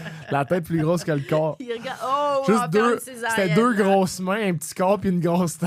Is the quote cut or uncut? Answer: uncut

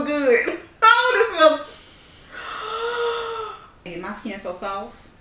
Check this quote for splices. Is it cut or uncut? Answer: cut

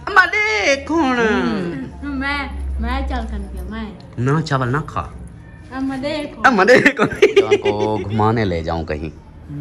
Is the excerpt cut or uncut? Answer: cut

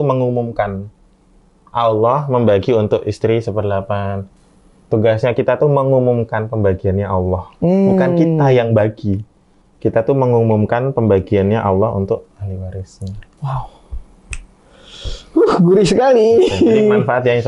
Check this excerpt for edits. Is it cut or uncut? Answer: uncut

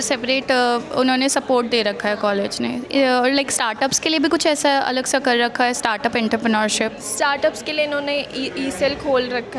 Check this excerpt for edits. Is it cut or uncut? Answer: uncut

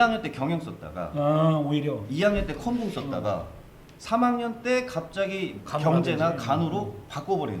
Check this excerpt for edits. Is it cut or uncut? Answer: cut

